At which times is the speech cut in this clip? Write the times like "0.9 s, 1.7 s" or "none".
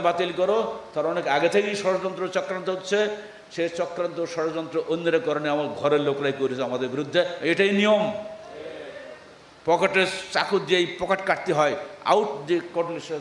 none